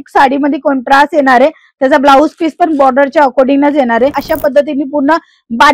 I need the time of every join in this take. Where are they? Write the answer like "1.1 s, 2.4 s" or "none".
4.2 s